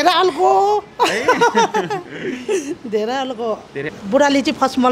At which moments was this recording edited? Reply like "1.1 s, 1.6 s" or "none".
3.9 s